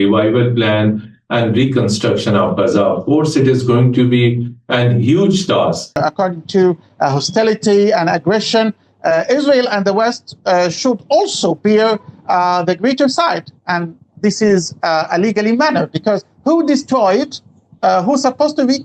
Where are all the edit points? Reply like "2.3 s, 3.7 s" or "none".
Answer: 6.0 s